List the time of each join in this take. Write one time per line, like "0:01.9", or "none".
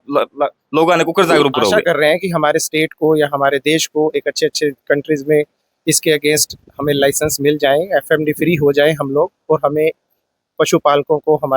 0:01.8